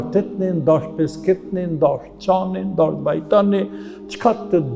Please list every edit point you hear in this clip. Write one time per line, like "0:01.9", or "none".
none

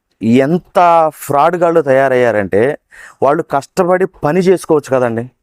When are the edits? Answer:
none

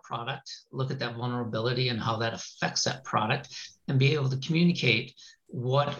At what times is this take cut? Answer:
none

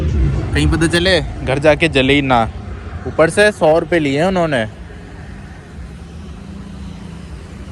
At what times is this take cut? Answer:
none

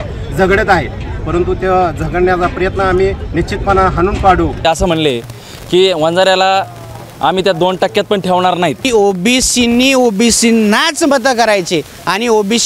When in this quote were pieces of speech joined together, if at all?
0:04.6
0:08.9

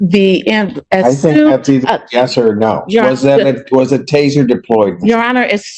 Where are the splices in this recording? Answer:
none

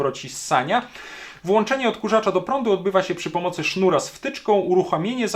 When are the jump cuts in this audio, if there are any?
none

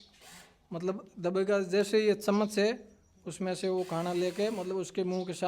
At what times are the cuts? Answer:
none

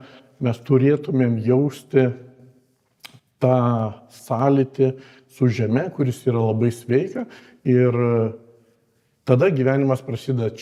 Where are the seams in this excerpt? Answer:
none

